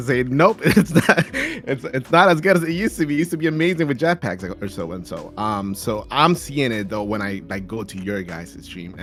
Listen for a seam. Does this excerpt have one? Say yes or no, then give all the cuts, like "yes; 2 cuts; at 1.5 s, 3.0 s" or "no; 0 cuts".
no; 0 cuts